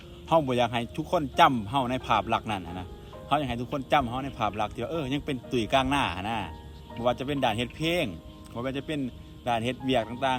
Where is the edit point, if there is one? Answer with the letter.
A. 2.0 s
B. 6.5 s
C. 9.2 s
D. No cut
D